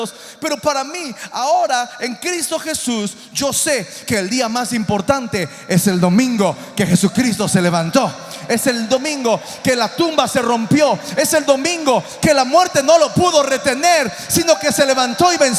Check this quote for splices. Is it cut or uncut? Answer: uncut